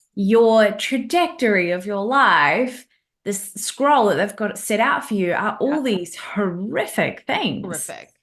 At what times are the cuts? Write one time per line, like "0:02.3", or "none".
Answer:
none